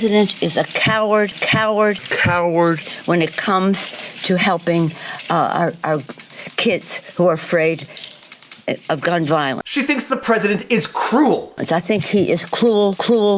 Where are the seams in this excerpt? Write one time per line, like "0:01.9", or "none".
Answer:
none